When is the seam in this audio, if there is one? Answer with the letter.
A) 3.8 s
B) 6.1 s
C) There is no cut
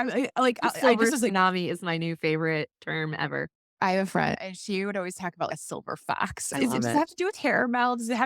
A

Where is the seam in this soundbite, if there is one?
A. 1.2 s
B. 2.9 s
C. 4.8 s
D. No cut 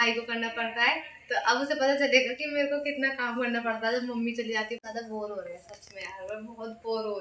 C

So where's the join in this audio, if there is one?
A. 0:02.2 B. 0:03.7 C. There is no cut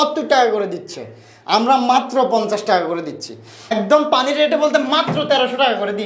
B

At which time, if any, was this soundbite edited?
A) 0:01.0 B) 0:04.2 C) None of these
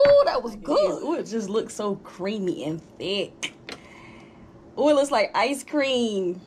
A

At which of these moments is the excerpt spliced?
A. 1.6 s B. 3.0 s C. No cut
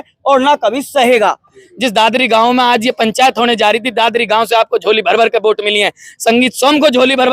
A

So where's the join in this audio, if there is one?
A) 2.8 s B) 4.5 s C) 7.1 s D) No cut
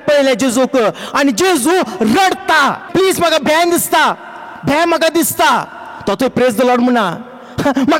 A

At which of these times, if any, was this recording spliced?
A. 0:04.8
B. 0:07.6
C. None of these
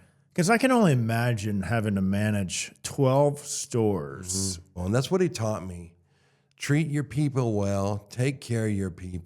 A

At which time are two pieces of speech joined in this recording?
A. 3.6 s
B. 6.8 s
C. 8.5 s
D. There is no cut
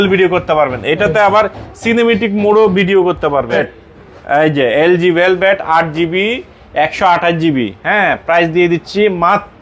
A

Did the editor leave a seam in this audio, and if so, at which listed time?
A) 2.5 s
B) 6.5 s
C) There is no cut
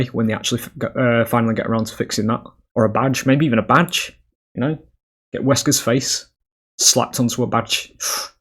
A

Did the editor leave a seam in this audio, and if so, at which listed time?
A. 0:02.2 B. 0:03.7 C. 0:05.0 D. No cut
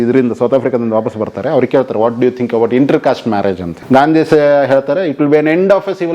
B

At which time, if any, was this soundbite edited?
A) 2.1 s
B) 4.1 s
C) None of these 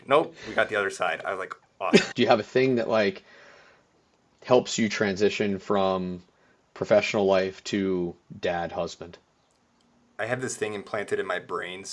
A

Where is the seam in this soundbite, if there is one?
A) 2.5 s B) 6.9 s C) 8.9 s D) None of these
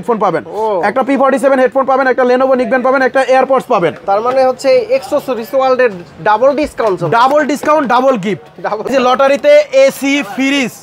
C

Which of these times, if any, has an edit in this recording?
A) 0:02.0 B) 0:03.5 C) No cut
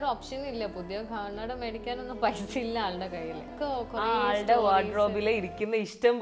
B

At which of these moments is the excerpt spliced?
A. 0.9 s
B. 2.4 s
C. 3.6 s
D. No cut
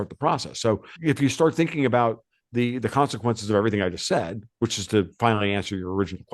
A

